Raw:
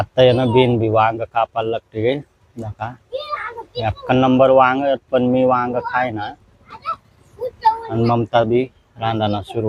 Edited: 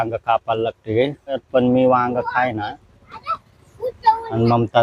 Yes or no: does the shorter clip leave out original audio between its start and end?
yes